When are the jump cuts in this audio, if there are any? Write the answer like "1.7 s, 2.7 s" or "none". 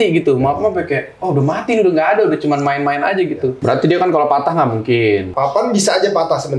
3.6 s, 5.3 s